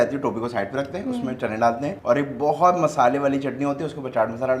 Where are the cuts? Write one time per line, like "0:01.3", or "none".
0:02.0